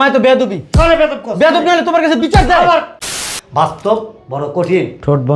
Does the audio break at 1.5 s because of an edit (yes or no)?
no